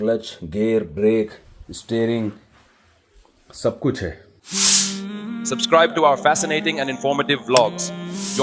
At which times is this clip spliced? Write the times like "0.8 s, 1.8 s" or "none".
4.3 s